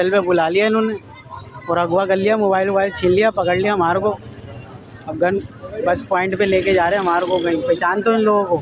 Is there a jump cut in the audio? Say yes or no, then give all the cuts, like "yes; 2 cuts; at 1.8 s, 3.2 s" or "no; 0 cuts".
no; 0 cuts